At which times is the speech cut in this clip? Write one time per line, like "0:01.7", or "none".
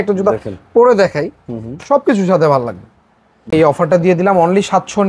0:03.5